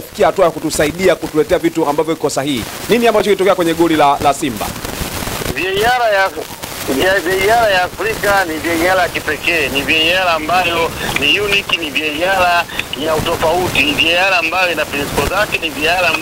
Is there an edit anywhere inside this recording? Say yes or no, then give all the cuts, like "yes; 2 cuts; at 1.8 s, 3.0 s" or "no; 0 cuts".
no; 0 cuts